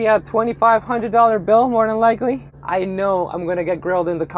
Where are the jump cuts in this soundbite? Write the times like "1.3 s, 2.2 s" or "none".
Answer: 2.6 s